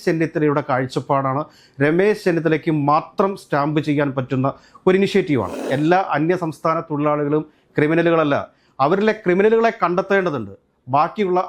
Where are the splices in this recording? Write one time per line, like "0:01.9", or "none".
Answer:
0:05.7